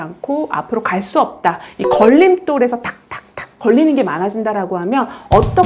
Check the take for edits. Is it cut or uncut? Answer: uncut